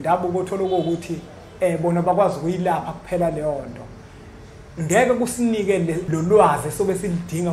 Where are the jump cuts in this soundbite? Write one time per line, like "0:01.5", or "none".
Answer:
0:06.1